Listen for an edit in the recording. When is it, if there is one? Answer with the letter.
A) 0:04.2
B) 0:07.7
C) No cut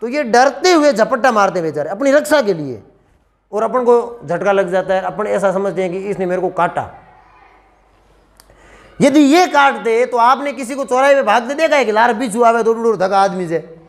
C